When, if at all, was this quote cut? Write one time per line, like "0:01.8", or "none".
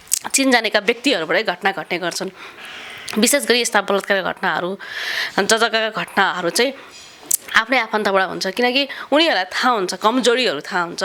none